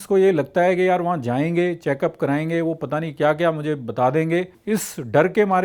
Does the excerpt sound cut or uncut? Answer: cut